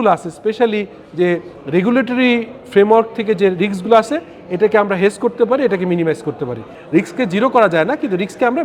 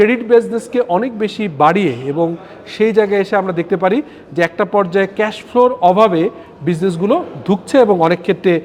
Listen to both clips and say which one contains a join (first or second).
first